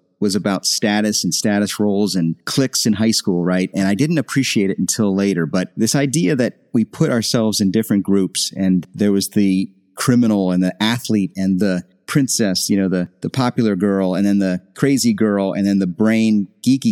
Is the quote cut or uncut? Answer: uncut